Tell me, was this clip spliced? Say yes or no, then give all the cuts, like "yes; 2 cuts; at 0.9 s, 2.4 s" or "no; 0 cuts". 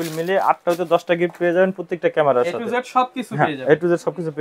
no; 0 cuts